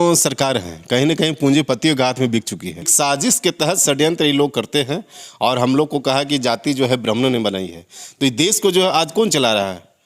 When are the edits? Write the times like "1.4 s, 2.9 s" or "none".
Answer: 2.9 s